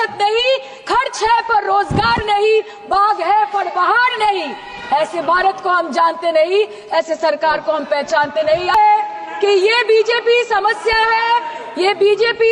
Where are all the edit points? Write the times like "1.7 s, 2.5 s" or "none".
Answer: 8.7 s